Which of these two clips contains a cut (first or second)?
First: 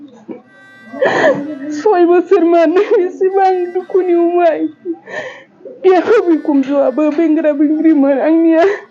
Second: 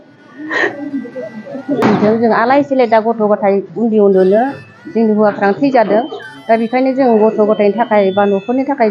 second